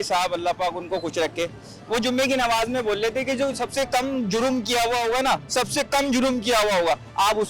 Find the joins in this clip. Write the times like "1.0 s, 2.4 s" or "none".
none